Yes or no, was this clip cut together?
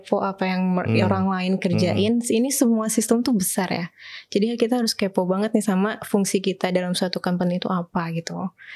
no